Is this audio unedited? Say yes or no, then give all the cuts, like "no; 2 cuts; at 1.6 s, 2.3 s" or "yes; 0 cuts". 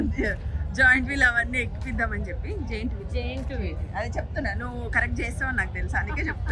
yes; 0 cuts